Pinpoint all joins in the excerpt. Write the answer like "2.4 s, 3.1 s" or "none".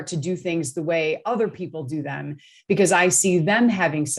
none